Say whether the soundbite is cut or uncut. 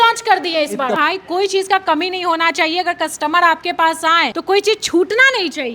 cut